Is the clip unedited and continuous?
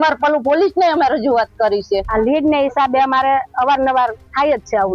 no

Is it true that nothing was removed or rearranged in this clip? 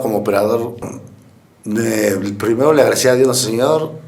no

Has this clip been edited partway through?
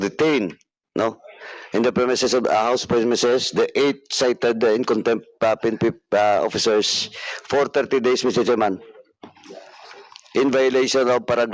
no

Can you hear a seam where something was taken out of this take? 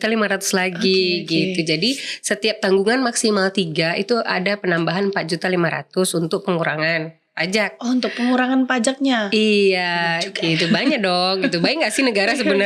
no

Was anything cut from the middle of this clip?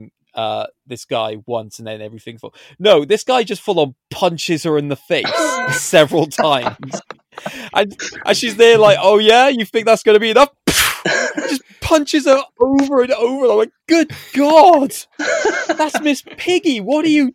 no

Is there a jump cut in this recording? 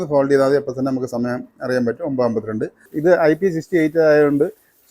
yes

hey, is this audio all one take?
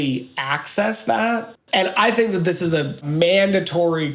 no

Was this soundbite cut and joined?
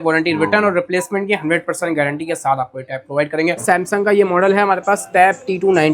yes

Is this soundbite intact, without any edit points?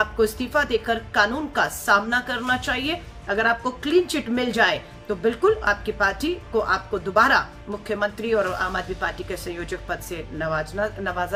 yes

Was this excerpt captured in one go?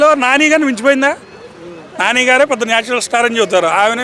yes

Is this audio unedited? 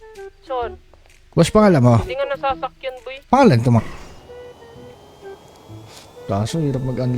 no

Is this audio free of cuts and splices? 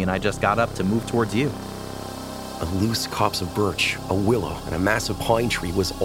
no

